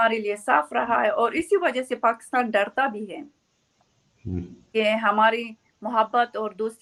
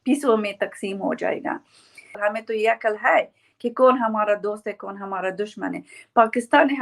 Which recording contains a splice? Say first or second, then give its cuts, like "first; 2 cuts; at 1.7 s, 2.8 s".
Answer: second; 1 cut; at 2.2 s